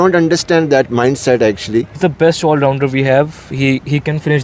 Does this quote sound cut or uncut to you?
cut